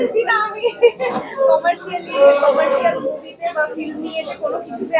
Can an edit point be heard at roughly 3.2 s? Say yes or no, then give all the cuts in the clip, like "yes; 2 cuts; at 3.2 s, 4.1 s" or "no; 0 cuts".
no; 0 cuts